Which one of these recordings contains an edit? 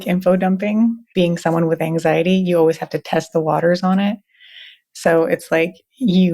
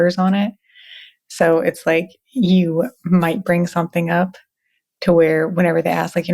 first; 1 cut; at 1.1 s

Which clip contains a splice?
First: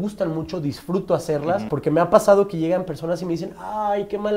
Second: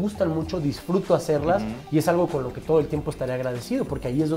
first; 1 cut; at 1.7 s

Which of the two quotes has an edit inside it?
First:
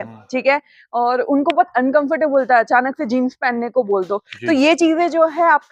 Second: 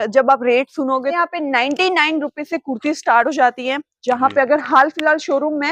second; 1 cut; at 1.1 s

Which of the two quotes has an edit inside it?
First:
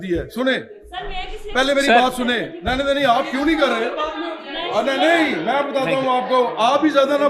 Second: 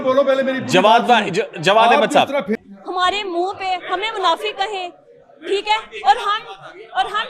second; 1 cut; at 2.6 s

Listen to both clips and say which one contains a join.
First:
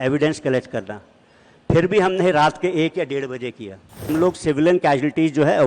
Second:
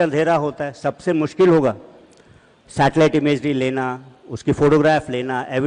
first; 1 cut; at 4.1 s

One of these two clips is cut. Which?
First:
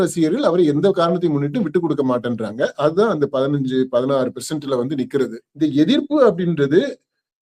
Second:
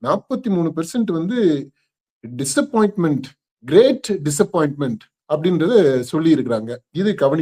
first; 1 cut; at 5.4 s

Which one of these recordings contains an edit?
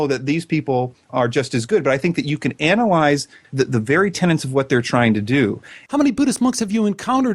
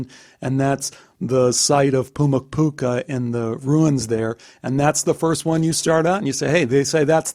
first; 3 cuts; at 1.1 s, 3.4 s, 5.7 s

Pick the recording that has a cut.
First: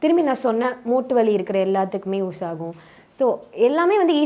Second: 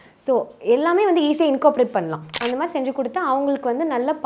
second; 1 cut; at 2.3 s

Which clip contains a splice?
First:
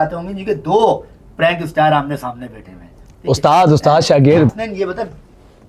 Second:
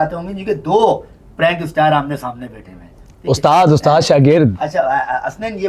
first; 1 cut; at 4.5 s

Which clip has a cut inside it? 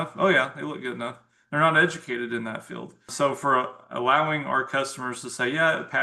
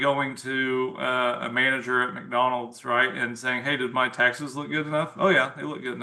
first; 1 cut; at 3.1 s

